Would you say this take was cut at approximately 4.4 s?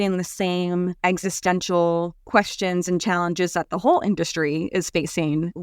no; 2 cuts; at 0.9 s, 2.2 s

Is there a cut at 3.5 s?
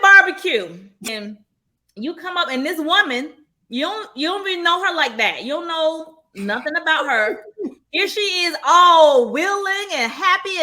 no; 1 cut; at 1.1 s

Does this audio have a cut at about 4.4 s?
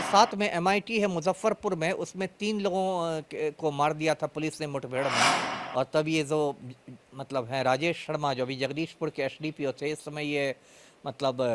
no; 0 cuts

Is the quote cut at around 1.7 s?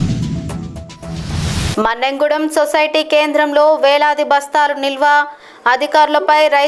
yes; 1 cut; at 1.7 s

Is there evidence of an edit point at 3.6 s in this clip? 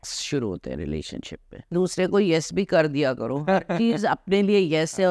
no; 1 cut; at 1.7 s

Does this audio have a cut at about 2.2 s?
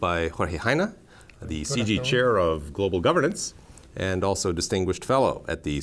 yes; 1 cut; at 2.2 s

